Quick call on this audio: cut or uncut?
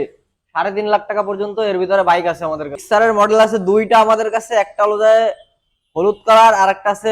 cut